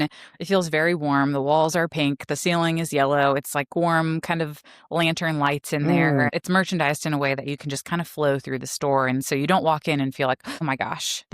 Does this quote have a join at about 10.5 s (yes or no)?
yes